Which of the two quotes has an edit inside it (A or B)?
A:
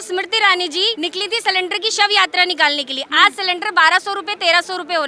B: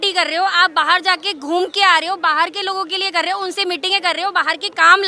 A